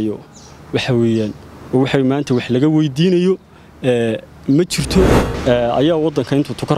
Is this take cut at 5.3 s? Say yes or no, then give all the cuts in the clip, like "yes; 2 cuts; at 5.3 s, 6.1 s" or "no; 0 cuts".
yes; 1 cut; at 5.3 s